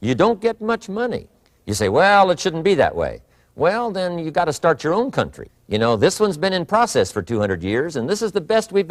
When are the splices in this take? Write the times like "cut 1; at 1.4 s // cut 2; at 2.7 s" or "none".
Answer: none